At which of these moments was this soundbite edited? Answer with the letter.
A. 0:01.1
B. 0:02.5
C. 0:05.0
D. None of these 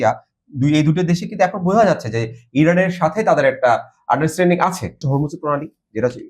C